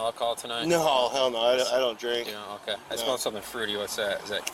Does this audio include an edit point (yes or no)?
no